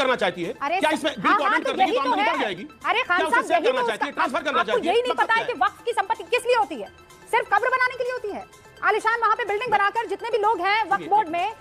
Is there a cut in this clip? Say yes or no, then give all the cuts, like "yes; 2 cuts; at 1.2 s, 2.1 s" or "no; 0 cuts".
no; 0 cuts